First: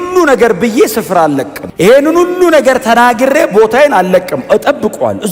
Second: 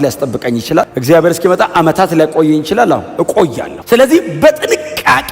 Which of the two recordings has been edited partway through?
second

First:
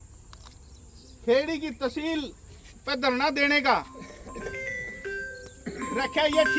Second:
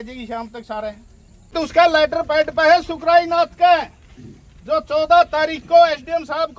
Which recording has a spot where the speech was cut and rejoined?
second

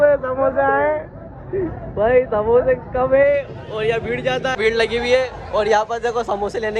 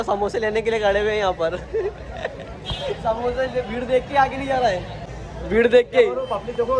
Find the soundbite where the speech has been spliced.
first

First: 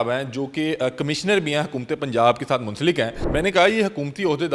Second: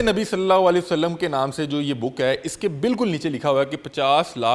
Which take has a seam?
first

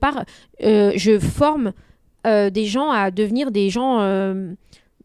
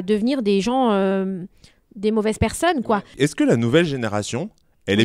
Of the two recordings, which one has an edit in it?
second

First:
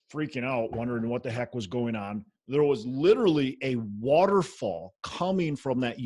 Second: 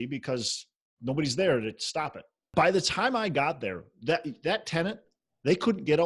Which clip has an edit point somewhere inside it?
second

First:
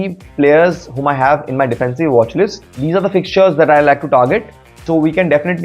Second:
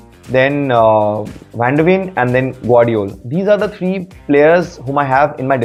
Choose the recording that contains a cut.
first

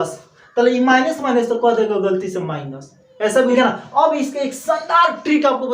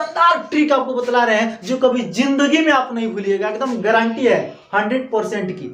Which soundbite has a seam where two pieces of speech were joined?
first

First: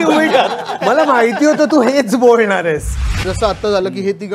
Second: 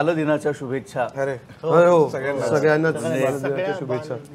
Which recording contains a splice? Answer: first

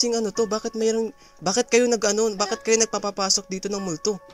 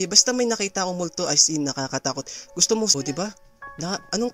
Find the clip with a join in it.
second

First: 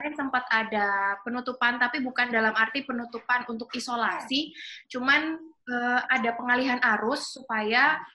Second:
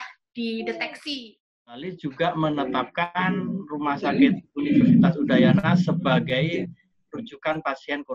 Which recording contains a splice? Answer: second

